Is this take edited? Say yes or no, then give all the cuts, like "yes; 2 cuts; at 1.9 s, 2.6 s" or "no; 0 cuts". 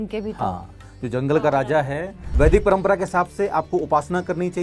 yes; 1 cut; at 2.2 s